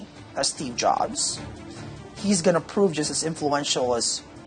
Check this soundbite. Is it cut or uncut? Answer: uncut